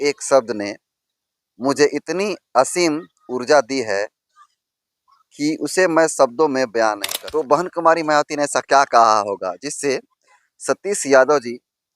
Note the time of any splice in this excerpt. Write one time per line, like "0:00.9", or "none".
0:07.1